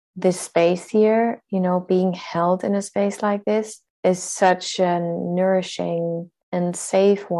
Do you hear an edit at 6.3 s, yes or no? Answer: yes